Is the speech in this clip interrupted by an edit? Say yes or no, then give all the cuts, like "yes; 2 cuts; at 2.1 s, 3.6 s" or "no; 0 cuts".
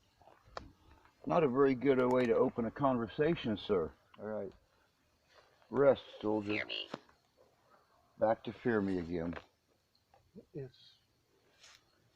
yes; 1 cut; at 4.0 s